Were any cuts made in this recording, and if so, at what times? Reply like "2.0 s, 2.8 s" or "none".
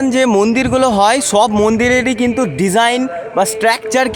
none